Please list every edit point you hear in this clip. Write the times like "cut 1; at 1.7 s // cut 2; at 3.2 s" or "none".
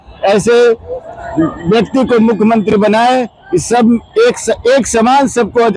none